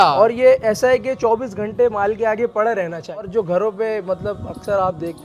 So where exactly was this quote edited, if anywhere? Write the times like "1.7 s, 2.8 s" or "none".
3.3 s